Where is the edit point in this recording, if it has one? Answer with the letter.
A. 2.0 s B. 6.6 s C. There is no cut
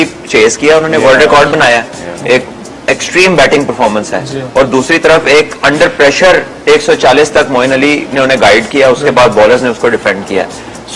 B